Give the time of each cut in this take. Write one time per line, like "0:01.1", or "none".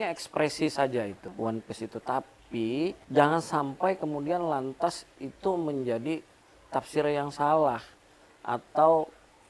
0:01.3
0:03.0